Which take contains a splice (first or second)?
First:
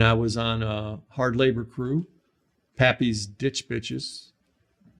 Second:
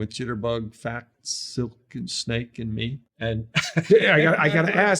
second